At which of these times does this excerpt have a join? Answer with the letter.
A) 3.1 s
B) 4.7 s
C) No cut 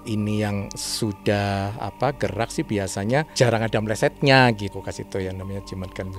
B